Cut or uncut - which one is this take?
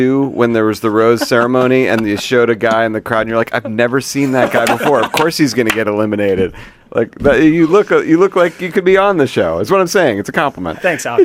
uncut